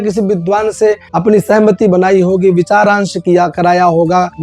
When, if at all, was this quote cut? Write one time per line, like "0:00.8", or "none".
0:01.1